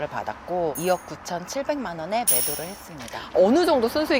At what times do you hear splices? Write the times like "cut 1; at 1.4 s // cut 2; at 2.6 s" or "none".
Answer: cut 1; at 3.3 s